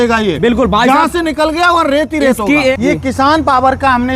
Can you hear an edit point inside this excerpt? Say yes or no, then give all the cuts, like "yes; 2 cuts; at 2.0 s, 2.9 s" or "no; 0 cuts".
yes; 1 cut; at 2.7 s